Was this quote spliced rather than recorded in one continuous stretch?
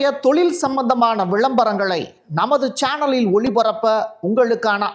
no; 0 cuts

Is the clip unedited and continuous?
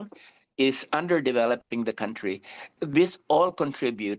no; 1 cut; at 2.8 s

